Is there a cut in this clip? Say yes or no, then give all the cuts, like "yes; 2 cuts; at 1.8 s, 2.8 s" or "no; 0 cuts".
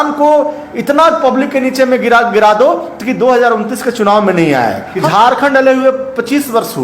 yes; 1 cut; at 4.9 s